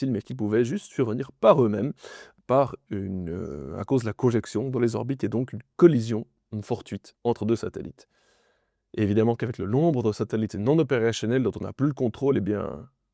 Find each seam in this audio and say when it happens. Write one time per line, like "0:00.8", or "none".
none